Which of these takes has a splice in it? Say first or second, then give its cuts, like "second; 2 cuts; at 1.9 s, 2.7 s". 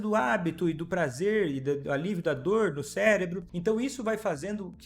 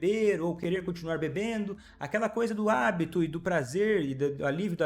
first; 1 cut; at 3.5 s